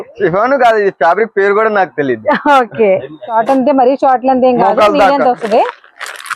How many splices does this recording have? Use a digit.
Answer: 1